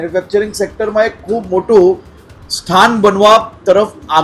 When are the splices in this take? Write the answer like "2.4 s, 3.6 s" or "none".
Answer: none